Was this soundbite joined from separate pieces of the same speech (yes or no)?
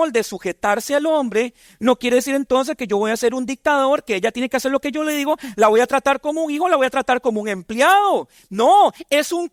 no